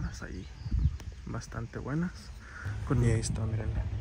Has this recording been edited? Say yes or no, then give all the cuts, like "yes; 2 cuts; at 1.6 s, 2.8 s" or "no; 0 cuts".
yes; 1 cut; at 3.0 s